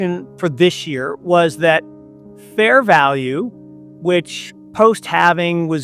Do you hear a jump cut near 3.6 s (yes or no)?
no